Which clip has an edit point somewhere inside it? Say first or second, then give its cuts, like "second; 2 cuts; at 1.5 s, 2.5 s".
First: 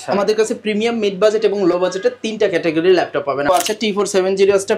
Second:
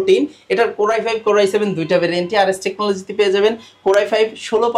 first; 1 cut; at 3.5 s